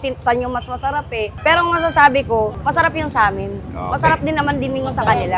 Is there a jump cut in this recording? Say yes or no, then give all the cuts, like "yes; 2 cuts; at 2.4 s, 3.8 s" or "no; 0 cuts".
no; 0 cuts